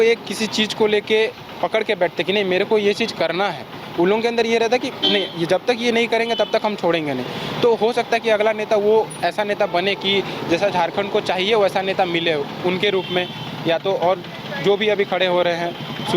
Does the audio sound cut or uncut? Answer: uncut